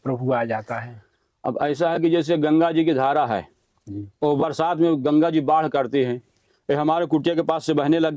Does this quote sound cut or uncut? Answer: uncut